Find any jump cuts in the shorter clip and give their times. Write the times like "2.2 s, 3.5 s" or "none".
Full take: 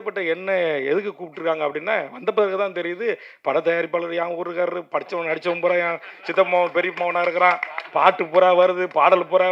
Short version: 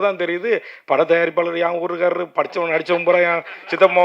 none